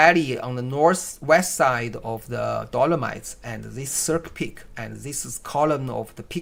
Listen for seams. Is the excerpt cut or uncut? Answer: uncut